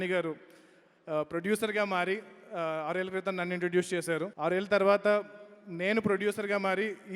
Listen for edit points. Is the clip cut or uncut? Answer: cut